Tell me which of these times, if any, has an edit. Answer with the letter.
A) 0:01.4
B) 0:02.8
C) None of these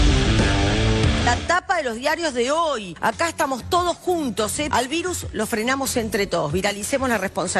A